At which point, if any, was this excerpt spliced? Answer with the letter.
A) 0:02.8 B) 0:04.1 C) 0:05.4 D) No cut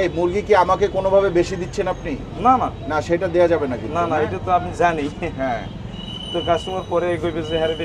D